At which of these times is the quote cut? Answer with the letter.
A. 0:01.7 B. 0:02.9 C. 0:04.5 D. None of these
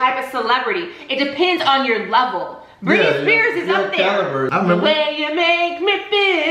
C